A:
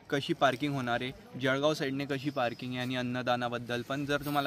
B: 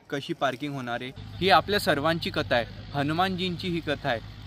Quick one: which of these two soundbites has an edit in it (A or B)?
B